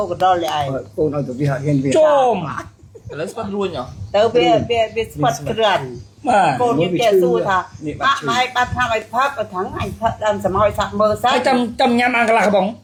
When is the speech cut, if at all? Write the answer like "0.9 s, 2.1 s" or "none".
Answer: none